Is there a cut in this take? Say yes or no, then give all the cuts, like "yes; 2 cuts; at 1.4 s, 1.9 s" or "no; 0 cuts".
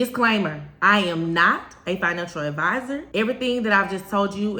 yes; 1 cut; at 3.1 s